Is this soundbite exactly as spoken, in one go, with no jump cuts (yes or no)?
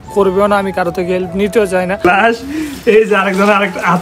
no